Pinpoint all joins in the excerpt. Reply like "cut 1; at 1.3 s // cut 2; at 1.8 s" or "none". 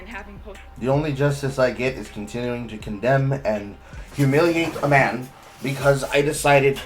none